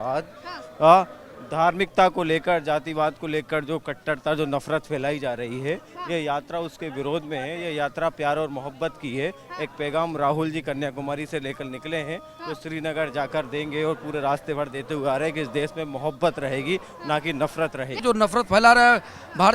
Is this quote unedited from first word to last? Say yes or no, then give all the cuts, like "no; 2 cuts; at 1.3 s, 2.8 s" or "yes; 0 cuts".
no; 1 cut; at 18.0 s